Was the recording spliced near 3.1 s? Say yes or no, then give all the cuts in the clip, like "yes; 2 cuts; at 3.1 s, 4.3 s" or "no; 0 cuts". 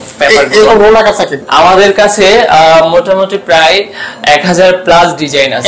no; 1 cut; at 1.4 s